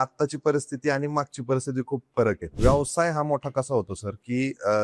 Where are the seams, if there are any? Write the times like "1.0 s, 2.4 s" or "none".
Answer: 2.5 s